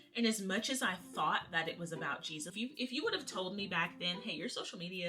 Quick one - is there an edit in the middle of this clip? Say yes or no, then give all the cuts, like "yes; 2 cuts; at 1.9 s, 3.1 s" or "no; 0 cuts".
yes; 1 cut; at 2.5 s